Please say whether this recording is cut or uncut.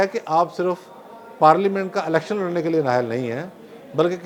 uncut